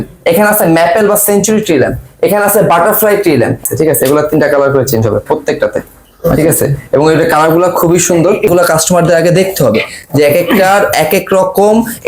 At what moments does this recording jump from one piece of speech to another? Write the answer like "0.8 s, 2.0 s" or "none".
3.6 s, 8.5 s

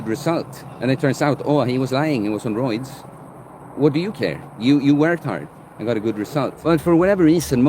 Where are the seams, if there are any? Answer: 6.6 s

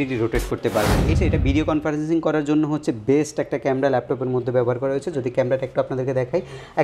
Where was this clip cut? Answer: 1.2 s

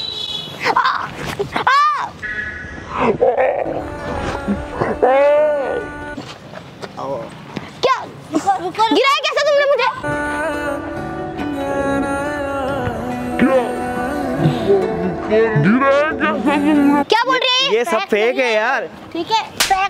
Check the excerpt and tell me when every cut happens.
17.0 s

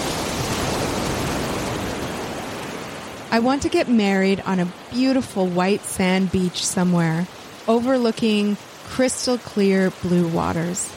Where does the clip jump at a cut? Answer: 3.2 s

